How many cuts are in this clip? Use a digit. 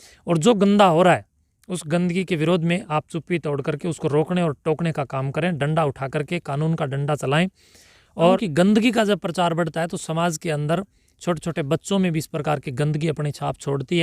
1